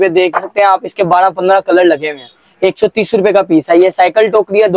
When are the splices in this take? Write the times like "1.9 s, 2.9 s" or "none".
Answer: none